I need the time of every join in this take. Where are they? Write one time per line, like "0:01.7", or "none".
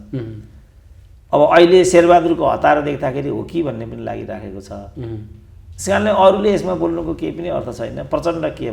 none